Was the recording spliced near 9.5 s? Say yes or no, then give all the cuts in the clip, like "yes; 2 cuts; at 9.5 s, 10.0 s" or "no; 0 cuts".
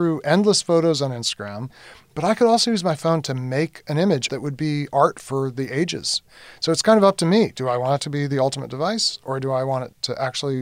no; 3 cuts; at 1.9 s, 4.2 s, 6.3 s